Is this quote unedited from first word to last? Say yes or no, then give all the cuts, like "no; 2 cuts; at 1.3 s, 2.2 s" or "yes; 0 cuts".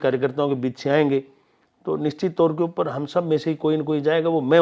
yes; 0 cuts